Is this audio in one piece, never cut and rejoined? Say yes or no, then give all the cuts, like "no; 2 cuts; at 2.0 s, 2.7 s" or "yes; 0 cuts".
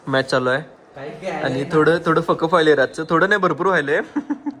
yes; 0 cuts